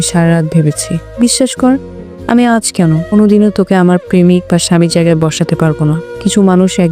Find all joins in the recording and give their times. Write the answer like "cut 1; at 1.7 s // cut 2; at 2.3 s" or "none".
cut 1; at 1.0 s